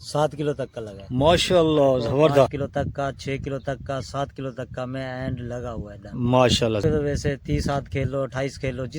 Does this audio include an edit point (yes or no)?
yes